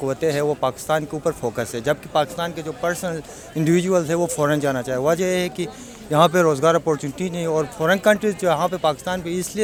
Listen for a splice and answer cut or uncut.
uncut